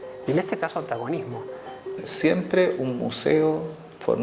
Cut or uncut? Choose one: cut